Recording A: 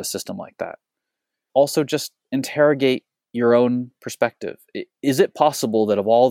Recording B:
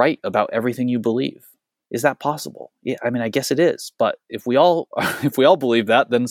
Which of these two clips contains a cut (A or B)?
A